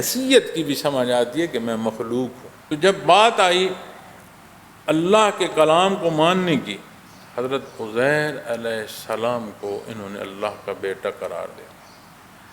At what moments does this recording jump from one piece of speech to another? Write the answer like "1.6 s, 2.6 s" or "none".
2.5 s